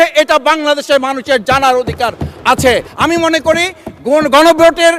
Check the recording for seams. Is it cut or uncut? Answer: cut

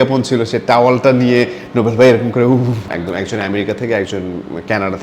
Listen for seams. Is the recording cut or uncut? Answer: cut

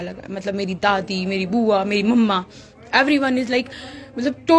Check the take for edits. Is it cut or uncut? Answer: uncut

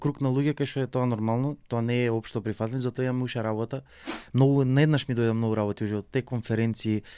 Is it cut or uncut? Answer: cut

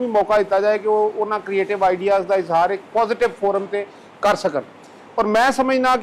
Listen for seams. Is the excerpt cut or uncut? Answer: uncut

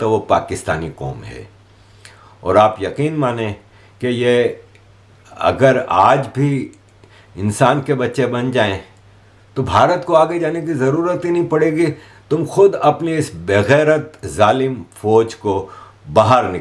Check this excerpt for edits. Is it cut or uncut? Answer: uncut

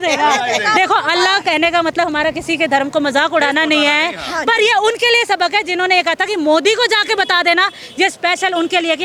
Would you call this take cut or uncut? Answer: uncut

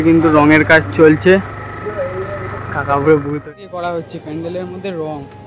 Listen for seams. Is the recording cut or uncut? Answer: cut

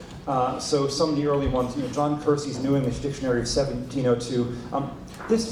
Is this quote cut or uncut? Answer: uncut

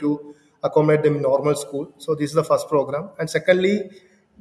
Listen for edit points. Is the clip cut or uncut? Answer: uncut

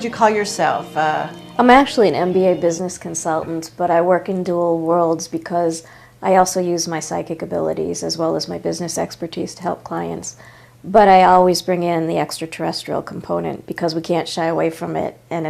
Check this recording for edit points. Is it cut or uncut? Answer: cut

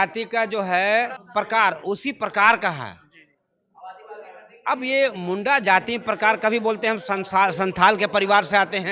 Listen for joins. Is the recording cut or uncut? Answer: cut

